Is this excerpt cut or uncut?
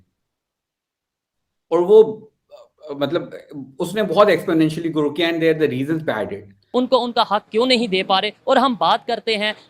cut